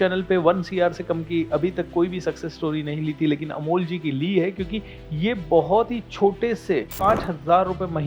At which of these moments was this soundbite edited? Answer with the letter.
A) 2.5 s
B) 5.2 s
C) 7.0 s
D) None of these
C